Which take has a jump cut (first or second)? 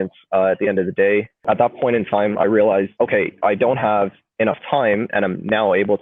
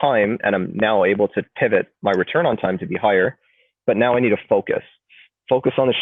first